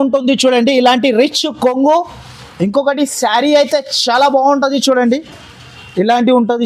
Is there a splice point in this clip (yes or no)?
no